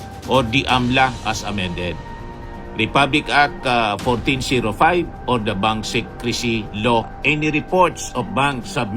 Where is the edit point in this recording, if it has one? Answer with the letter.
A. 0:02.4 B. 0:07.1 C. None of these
B